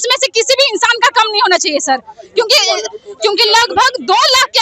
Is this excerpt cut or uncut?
uncut